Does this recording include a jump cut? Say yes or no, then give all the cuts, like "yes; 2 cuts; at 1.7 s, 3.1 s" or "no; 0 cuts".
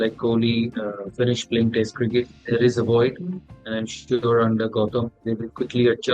yes; 2 cuts; at 2.4 s, 5.2 s